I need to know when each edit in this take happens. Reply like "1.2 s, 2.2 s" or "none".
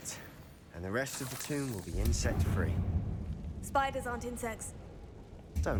none